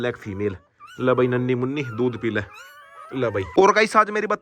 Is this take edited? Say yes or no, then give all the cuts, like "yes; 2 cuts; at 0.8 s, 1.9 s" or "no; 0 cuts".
yes; 1 cut; at 3.5 s